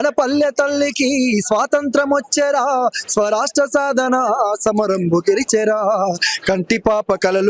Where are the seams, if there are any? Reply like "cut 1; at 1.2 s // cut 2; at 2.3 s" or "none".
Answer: none

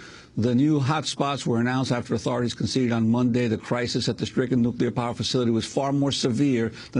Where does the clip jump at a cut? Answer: none

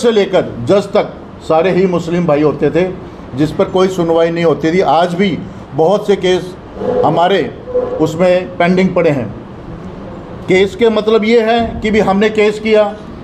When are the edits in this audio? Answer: none

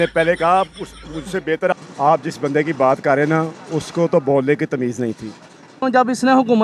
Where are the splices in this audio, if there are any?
cut 1; at 1.7 s // cut 2; at 5.7 s

